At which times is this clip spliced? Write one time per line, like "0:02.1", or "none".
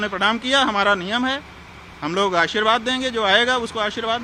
none